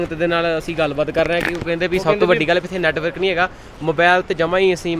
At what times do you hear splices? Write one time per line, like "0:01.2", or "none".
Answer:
none